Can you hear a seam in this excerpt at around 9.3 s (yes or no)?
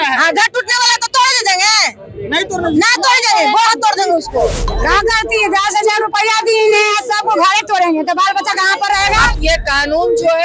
yes